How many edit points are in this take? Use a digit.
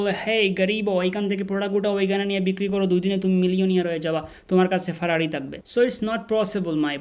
0